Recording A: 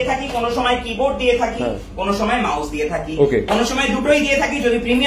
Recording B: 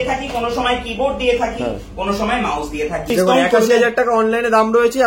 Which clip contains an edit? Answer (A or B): B